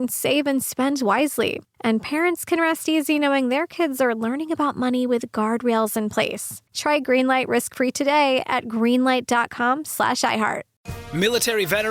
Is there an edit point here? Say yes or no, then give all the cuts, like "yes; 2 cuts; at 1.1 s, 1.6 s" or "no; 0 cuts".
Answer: yes; 1 cut; at 11.0 s